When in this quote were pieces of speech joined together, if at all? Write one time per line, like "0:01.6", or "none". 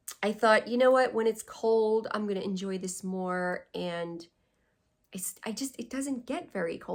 none